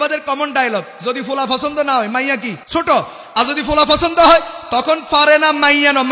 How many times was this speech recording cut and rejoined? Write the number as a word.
one